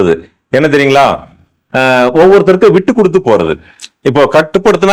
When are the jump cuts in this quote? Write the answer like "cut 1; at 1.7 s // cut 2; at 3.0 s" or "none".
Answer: none